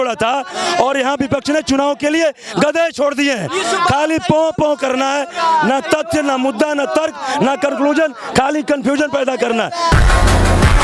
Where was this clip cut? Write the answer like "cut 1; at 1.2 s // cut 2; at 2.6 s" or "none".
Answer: cut 1; at 9.9 s